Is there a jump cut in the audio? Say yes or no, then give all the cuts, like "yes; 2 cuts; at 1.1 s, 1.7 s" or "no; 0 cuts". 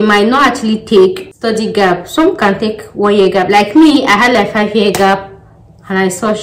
yes; 1 cut; at 1.2 s